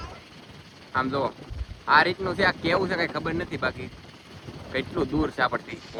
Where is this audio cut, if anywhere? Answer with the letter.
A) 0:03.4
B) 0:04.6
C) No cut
C